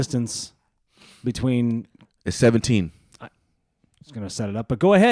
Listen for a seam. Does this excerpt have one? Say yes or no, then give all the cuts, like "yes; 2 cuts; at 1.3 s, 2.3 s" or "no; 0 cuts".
no; 0 cuts